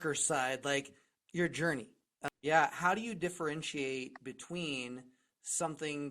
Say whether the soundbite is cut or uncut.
cut